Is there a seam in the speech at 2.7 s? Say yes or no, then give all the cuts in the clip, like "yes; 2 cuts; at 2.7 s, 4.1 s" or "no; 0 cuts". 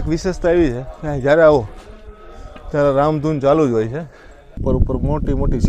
no; 1 cut; at 4.5 s